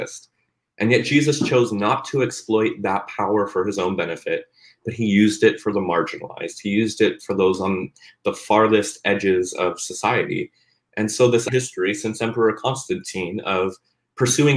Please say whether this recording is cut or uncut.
cut